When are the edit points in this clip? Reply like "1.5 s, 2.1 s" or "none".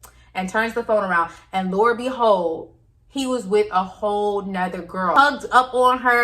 5.1 s